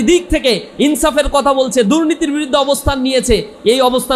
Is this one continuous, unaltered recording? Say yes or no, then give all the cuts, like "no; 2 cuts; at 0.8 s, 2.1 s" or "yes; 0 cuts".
yes; 0 cuts